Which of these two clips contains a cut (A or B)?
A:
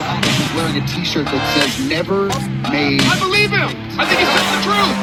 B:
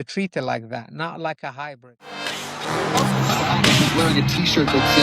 B